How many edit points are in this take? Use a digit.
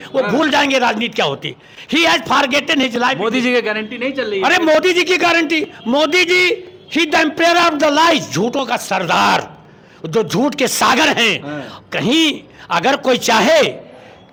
0